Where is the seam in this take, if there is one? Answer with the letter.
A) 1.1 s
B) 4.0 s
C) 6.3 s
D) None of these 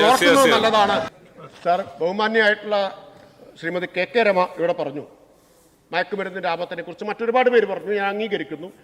A